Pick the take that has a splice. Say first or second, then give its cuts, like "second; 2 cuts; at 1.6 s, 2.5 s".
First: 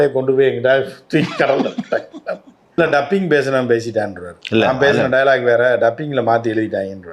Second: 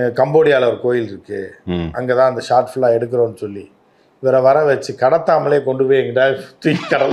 first; 1 cut; at 2.8 s